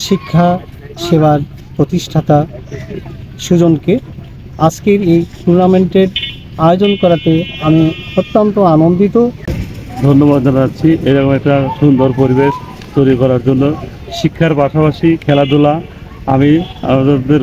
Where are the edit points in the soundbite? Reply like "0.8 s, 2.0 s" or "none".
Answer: 9.6 s